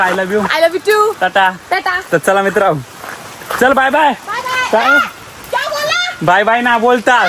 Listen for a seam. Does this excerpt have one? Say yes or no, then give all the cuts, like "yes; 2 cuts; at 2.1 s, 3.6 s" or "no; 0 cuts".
no; 0 cuts